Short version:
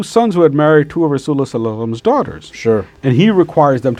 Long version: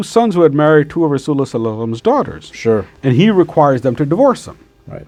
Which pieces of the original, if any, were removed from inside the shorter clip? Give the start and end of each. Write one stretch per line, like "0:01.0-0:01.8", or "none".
none